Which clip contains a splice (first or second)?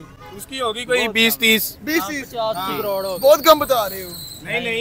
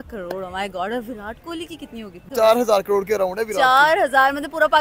second